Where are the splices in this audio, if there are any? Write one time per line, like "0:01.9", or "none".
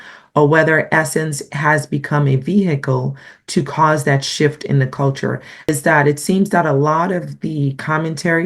0:05.7